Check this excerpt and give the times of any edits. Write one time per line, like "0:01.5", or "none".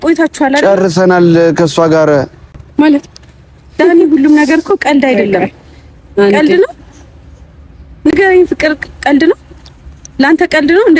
none